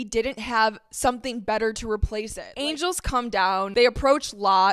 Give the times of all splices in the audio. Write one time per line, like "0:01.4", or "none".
0:02.4
0:03.7